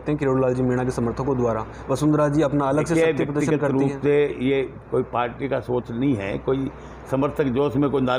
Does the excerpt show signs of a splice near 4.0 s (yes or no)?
no